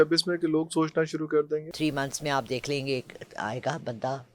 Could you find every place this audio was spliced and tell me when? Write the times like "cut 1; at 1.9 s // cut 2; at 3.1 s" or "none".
cut 1; at 1.7 s